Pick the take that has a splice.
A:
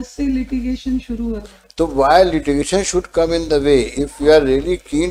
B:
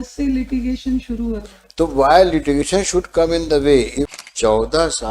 B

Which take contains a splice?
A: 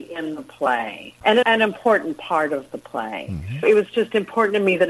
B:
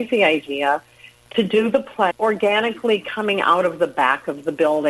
A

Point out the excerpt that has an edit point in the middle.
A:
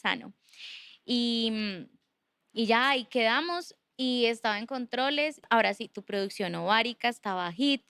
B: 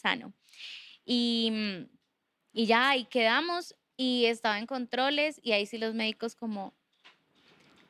A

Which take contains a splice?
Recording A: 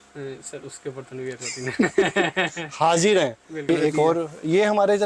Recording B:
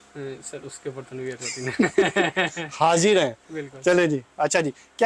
A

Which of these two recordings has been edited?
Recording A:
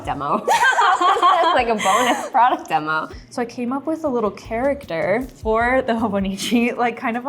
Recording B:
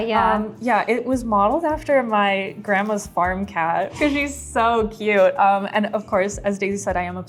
A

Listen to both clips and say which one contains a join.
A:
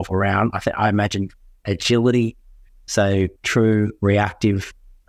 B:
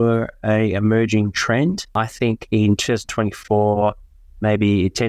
B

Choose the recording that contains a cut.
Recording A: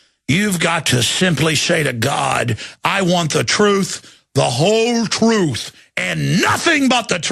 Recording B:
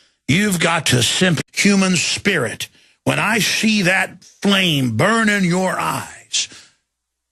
A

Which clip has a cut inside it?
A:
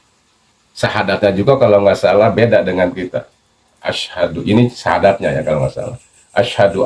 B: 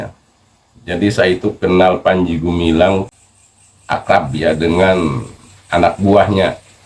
B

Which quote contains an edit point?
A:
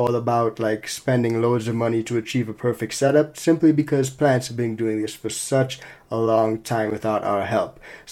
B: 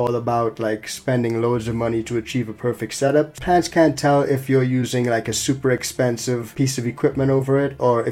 B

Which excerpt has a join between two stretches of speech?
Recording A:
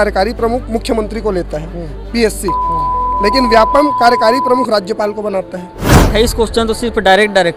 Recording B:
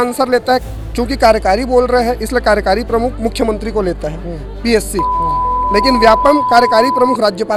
A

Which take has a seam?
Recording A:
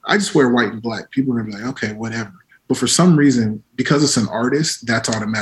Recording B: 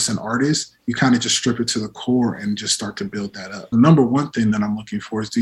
B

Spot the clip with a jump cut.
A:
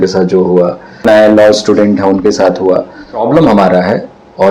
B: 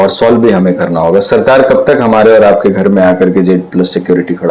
A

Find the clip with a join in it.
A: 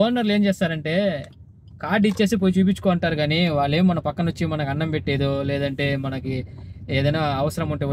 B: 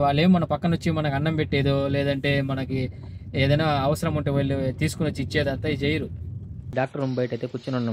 B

